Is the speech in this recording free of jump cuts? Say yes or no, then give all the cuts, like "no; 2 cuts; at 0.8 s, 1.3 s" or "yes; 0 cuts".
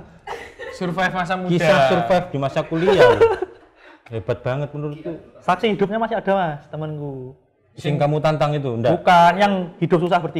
yes; 0 cuts